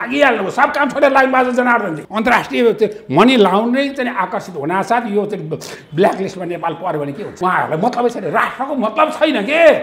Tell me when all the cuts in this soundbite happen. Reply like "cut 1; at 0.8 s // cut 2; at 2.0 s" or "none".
cut 1; at 2.0 s // cut 2; at 7.3 s